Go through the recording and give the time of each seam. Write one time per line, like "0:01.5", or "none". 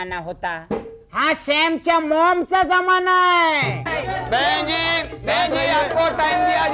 0:03.9